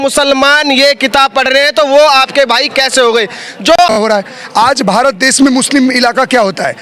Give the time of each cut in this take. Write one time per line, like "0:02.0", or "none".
0:03.9